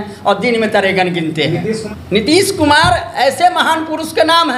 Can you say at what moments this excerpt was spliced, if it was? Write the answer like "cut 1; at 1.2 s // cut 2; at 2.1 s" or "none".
cut 1; at 1.9 s